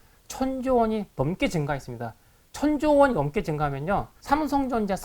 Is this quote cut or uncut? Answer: cut